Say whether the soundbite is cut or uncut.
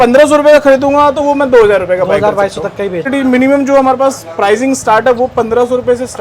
cut